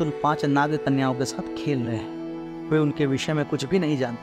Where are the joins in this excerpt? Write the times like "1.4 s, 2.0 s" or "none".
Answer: none